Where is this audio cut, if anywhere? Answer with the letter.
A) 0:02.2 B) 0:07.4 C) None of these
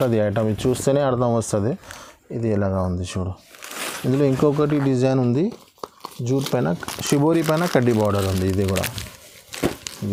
C